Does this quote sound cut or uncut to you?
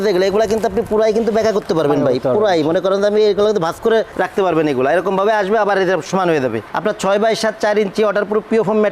cut